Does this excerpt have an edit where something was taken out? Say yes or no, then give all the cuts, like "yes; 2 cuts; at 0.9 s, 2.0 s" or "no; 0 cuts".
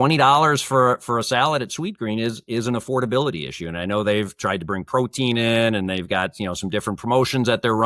no; 0 cuts